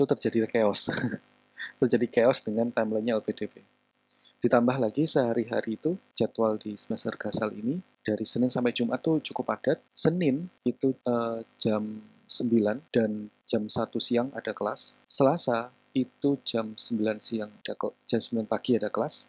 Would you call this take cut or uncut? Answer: uncut